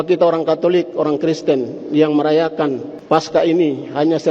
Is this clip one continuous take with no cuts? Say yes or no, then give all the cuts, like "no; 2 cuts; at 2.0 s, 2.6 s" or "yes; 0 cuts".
no; 1 cut; at 2.9 s